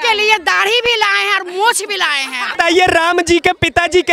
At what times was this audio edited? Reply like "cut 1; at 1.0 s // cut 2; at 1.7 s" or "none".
cut 1; at 2.5 s